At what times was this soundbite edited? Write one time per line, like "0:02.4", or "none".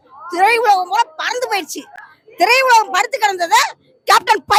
none